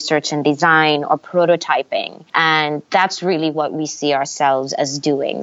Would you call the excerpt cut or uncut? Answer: cut